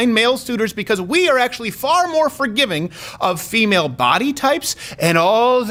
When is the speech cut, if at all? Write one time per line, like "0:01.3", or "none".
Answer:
none